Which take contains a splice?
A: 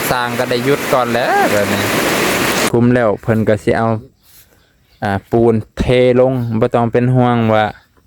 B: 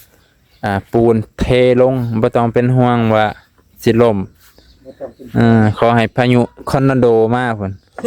A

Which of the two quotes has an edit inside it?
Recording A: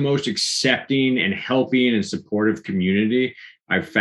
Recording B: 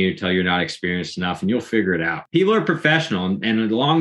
B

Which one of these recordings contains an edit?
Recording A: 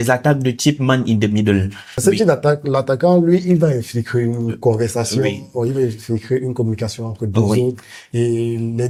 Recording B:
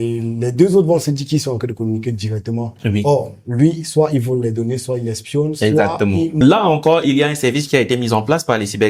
B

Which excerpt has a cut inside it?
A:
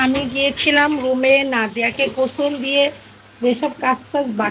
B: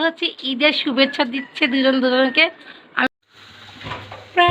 B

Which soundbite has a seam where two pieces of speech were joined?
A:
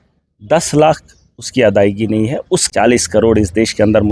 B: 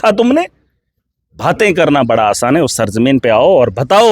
A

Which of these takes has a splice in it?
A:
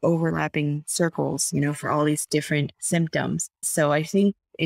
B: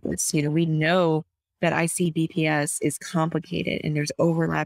A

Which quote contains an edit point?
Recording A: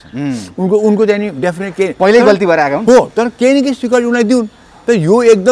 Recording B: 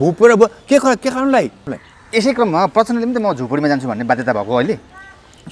B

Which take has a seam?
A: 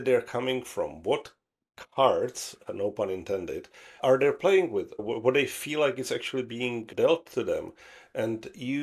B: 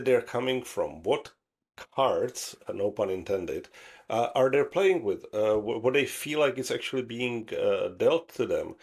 A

